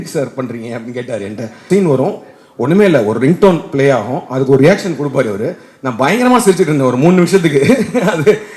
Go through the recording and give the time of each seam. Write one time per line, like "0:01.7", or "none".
0:01.7